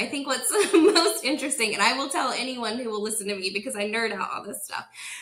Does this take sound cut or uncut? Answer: uncut